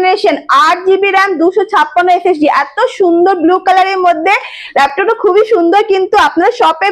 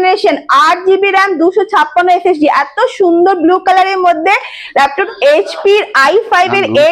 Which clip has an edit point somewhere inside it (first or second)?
second